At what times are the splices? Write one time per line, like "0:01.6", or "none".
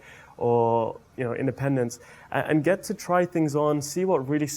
0:01.0